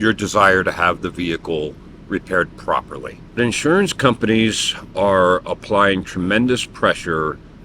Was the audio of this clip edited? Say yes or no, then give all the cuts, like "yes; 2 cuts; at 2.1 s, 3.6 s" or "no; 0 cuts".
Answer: yes; 1 cut; at 3.4 s